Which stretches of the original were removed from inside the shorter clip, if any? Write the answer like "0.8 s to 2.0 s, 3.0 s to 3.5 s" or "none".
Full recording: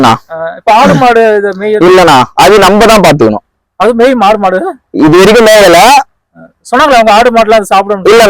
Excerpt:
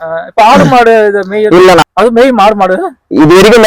2.1 s to 3.6 s